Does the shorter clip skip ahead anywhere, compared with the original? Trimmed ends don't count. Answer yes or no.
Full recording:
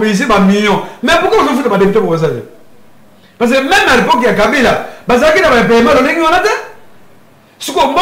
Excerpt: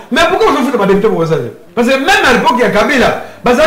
yes